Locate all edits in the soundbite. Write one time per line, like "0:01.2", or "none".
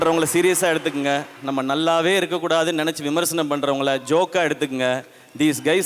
none